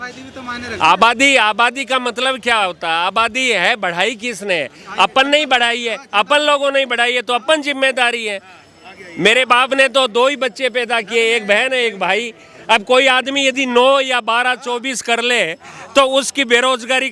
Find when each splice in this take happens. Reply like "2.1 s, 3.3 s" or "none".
none